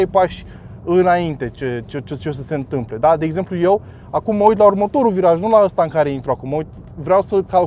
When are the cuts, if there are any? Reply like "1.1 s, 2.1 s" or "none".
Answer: none